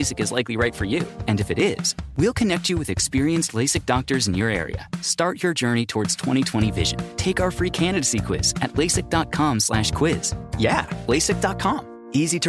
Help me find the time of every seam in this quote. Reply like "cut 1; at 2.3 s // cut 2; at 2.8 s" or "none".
none